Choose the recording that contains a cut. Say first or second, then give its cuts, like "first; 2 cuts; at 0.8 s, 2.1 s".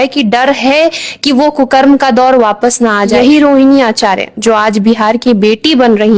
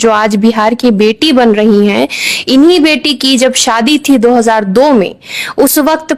first; 1 cut; at 3.1 s